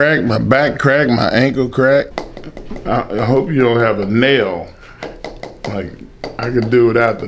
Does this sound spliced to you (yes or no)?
yes